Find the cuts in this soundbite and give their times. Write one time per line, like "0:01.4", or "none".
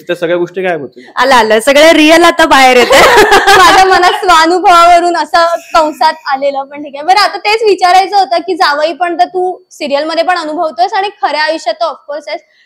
none